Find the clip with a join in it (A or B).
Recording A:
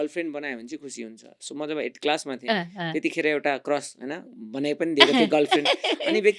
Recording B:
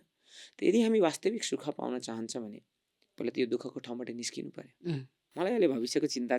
B